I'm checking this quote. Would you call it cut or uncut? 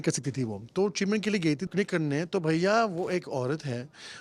cut